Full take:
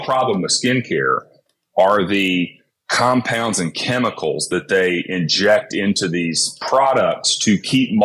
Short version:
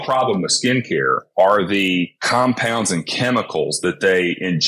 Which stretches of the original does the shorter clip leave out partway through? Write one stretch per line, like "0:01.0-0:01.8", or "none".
0:01.2-0:01.6
0:02.6-0:02.9